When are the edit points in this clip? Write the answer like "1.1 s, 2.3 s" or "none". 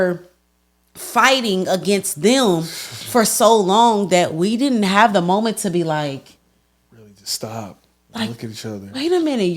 none